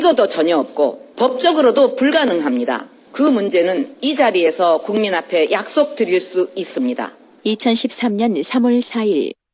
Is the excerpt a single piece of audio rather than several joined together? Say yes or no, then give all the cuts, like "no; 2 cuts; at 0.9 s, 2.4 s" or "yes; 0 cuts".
no; 2 cuts; at 1.0 s, 3.0 s